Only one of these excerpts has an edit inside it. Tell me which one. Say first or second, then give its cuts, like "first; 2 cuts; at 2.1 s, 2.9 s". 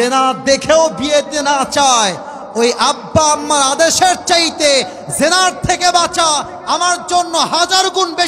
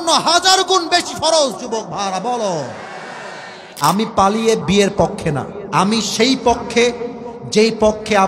second; 2 cuts; at 3.7 s, 5.6 s